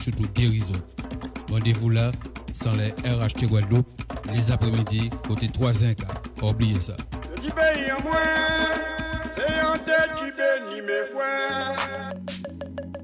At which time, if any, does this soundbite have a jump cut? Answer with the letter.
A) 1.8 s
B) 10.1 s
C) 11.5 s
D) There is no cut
C